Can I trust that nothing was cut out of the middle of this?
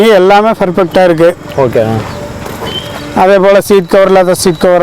yes; 0 cuts

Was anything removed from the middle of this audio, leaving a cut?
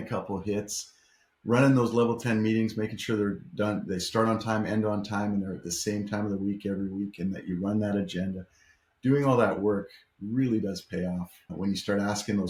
no; 0 cuts

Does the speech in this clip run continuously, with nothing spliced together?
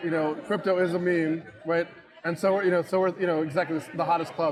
yes; 0 cuts

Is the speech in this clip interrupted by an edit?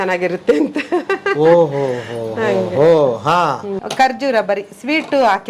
yes; 1 cut; at 3.7 s

